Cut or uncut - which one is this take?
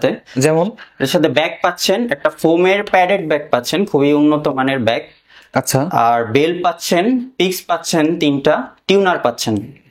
uncut